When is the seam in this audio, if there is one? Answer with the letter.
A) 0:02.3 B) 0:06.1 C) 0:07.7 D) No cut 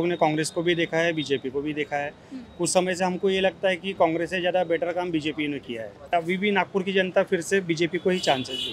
B